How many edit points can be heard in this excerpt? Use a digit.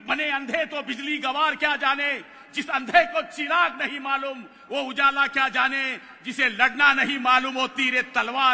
0